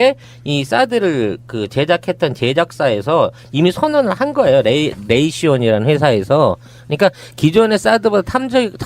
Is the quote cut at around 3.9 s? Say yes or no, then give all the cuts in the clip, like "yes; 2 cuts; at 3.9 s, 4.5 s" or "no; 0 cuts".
yes; 1 cut; at 3.9 s